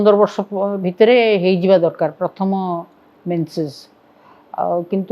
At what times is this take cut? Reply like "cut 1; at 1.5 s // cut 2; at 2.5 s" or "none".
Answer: none